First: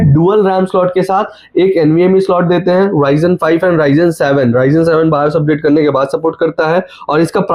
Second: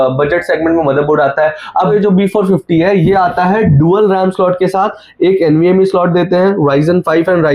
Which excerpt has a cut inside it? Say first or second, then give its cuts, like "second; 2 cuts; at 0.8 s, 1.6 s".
second; 1 cut; at 1.9 s